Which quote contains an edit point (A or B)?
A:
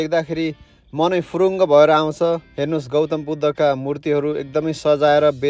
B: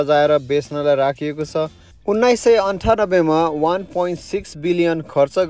B